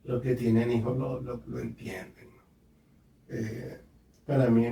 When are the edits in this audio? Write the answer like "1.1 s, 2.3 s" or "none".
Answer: none